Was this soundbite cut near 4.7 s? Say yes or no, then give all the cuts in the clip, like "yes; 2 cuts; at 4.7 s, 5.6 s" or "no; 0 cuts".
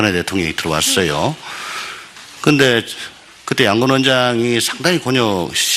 yes; 1 cut; at 4.7 s